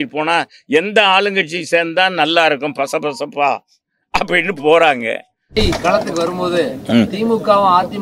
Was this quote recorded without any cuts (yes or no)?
no